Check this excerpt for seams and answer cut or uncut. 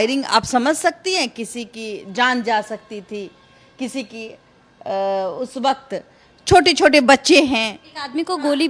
uncut